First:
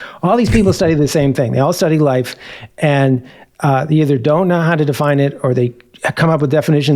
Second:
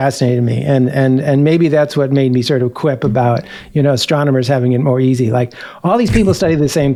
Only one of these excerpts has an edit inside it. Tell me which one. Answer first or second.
first